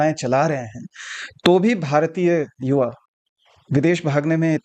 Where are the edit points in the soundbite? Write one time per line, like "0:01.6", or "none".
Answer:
none